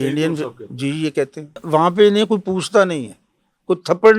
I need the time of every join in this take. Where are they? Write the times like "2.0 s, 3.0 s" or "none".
1.6 s